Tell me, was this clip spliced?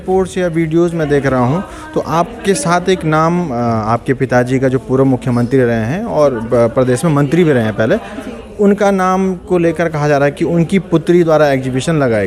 no; 0 cuts

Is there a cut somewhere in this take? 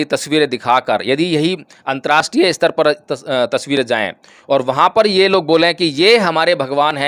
no; 0 cuts

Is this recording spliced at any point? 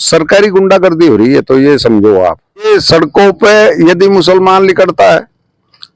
yes; 1 cut; at 2.7 s

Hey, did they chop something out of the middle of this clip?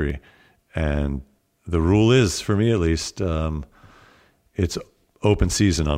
yes; 1 cut; at 1.3 s

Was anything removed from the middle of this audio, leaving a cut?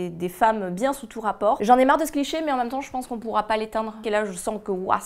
yes; 2 cuts; at 1.6 s, 4.0 s

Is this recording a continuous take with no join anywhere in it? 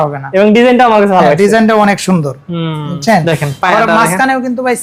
yes; 0 cuts

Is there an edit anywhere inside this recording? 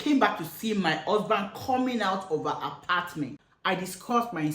yes; 1 cut; at 3.5 s

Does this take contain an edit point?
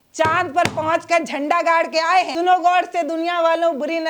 yes; 1 cut; at 2.3 s

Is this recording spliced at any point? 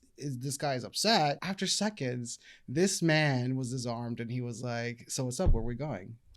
yes; 1 cut; at 1.5 s

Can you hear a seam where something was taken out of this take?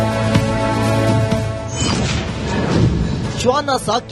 no; 0 cuts

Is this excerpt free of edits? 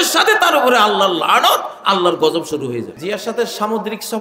no; 1 cut; at 2.9 s

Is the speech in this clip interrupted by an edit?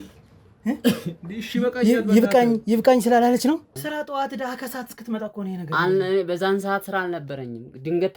yes; 1 cut; at 3.8 s

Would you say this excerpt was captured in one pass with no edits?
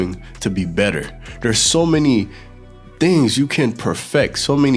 yes; 0 cuts

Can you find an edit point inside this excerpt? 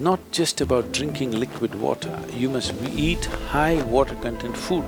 no; 0 cuts

